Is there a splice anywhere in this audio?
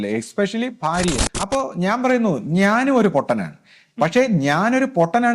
yes; 1 cut; at 1.3 s

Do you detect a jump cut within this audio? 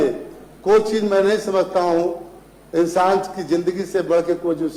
no; 0 cuts

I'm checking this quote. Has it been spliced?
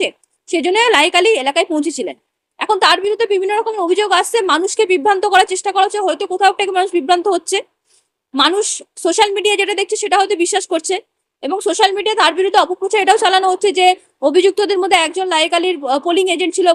no; 0 cuts

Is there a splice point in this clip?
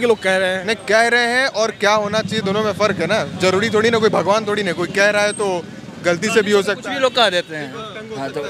no; 0 cuts

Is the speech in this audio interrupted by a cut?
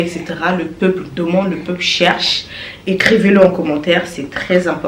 no; 0 cuts

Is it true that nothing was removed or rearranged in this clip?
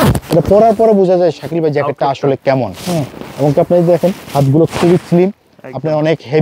yes; 0 cuts

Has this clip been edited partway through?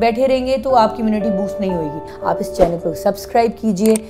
yes; 1 cut; at 2.1 s

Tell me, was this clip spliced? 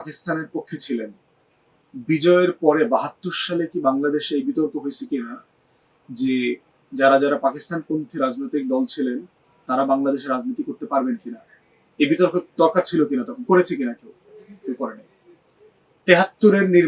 no; 0 cuts

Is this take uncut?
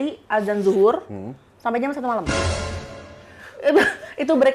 yes; 0 cuts

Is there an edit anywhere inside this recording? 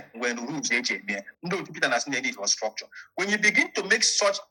yes; 1 cut; at 1.2 s

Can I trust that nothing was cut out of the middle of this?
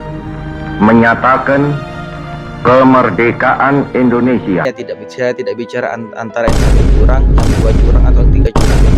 no; 1 cut; at 4.6 s

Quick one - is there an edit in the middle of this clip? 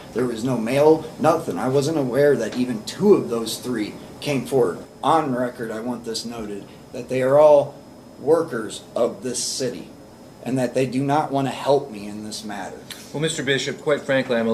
yes; 1 cut; at 4.8 s

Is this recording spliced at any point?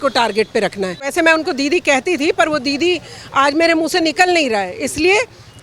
yes; 1 cut; at 1.1 s

